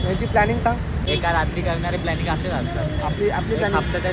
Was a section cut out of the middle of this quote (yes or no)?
yes